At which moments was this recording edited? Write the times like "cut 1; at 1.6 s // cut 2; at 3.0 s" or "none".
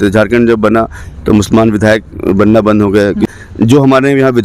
cut 1; at 3.3 s